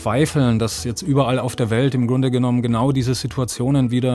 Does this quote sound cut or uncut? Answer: uncut